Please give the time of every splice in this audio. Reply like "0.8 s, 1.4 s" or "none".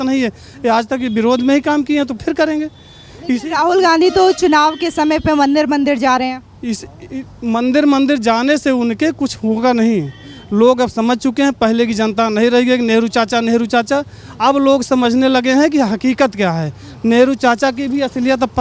none